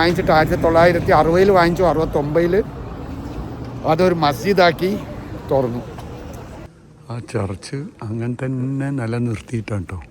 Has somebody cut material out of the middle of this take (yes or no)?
yes